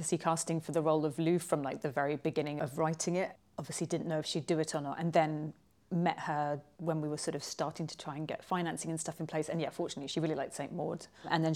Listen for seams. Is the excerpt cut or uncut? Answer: uncut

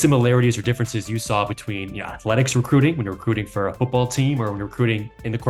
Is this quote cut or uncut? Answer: uncut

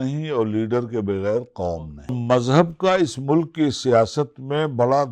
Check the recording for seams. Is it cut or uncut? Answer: cut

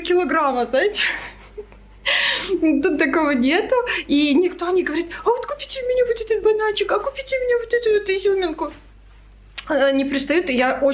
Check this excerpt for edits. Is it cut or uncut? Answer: uncut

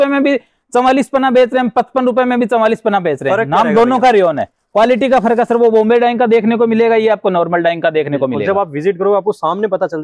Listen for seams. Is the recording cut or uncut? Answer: uncut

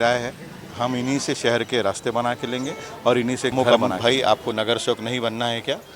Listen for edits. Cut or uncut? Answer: cut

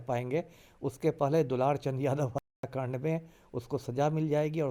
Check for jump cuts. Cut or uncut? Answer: uncut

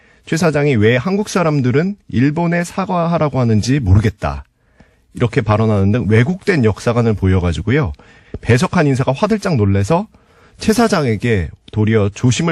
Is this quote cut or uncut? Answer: cut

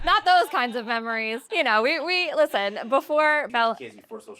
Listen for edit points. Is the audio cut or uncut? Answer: cut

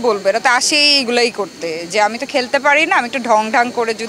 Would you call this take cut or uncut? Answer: uncut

